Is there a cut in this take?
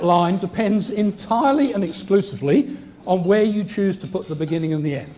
yes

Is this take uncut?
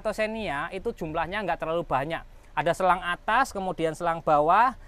yes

